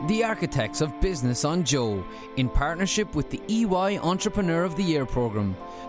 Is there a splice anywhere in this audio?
no; 0 cuts

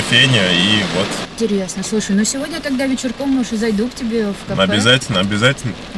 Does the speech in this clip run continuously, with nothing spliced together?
yes; 0 cuts

